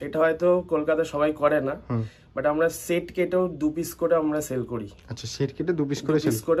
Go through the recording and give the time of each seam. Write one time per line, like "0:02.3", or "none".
none